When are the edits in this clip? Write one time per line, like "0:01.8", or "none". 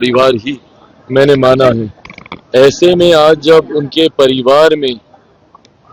none